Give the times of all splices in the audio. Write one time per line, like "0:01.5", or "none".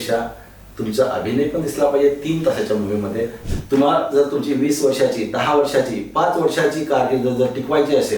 0:03.5

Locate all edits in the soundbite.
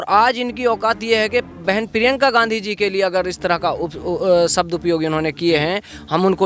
none

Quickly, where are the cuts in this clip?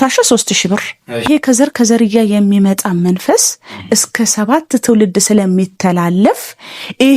0:01.3

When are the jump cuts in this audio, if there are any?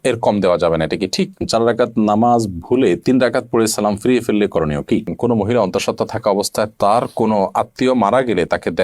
0:01.4
0:05.1

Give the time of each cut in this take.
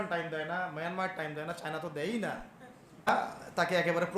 0:03.1

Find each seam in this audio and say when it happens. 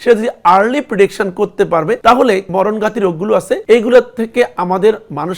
0:02.4
0:03.6

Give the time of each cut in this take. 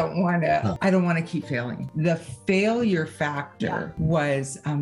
0:00.8
0:01.8
0:03.9

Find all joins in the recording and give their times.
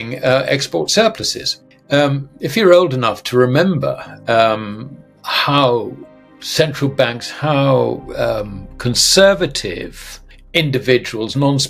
0:01.7

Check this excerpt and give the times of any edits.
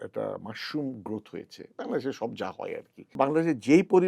0:03.1

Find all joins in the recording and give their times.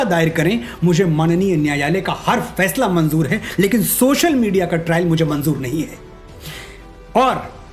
none

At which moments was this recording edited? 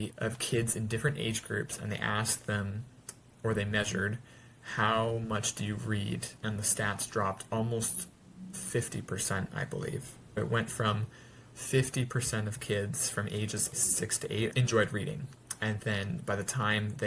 0:06.3
0:10.4
0:13.8

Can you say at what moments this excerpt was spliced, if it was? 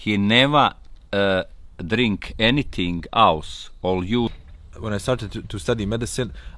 0:04.3

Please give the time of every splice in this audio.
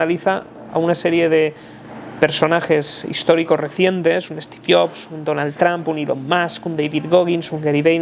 none

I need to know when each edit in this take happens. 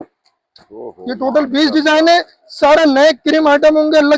none

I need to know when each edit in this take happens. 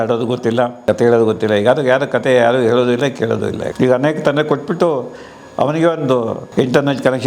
0:00.8
0:03.6
0:06.4

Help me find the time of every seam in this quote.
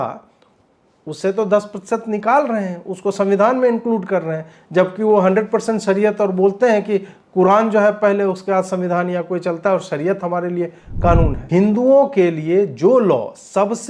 0:11.4

